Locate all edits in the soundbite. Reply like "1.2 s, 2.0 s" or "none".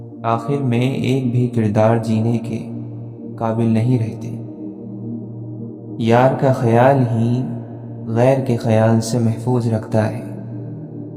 4.1 s, 6.0 s, 10.2 s